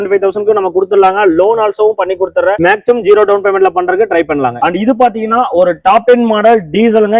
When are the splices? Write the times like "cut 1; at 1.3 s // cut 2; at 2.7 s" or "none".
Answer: cut 1; at 4.6 s